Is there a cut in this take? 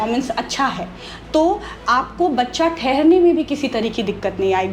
no; 0 cuts

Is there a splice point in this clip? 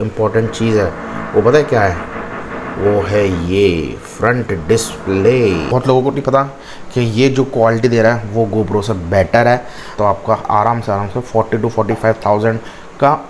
yes; 2 cuts; at 5.6 s, 9.9 s

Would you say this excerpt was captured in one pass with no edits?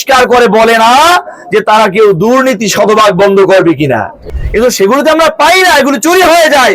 no; 1 cut; at 4.2 s

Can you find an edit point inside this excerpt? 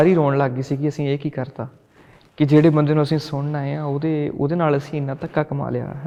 no; 0 cuts

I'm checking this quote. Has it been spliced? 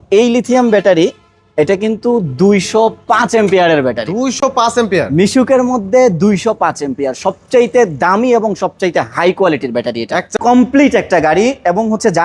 yes; 1 cut; at 10.3 s

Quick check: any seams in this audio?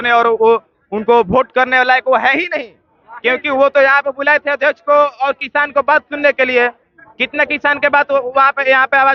no; 0 cuts

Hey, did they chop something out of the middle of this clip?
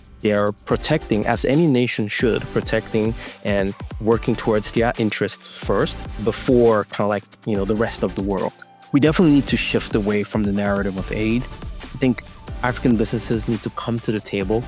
yes; 1 cut; at 8.7 s

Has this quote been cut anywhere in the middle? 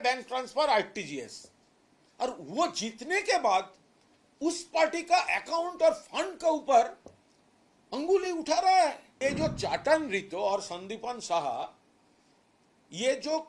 yes; 1 cut; at 9.2 s

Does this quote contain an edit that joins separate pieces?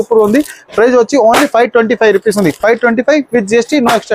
no; 0 cuts

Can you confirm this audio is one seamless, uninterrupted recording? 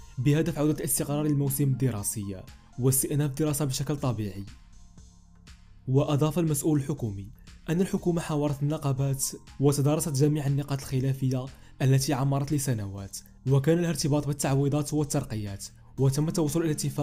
yes; 0 cuts

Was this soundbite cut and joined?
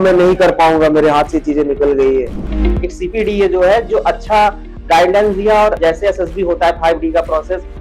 yes; 2 cuts; at 2.5 s, 5.8 s

